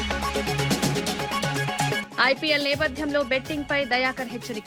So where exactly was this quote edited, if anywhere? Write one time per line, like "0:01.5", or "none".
0:02.0